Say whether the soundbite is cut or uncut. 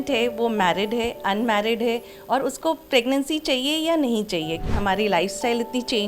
cut